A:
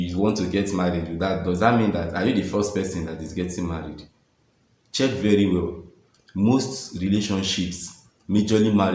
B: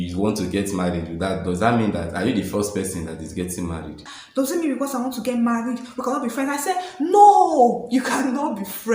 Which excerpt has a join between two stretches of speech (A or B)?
B